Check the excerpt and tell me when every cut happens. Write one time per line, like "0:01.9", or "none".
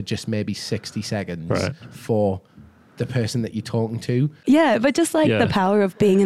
0:04.4